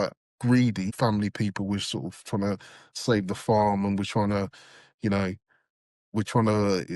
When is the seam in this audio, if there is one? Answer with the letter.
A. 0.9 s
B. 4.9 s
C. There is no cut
A